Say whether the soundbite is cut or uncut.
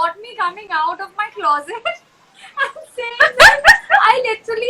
uncut